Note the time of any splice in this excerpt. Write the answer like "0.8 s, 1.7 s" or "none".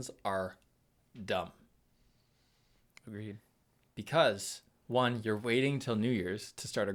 none